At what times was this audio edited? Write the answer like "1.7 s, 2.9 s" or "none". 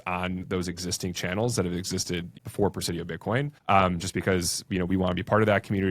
2.3 s, 3.5 s